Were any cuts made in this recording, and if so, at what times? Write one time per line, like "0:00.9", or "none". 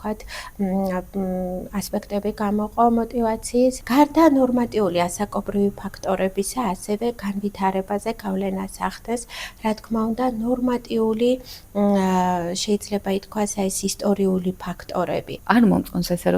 0:03.8
0:15.4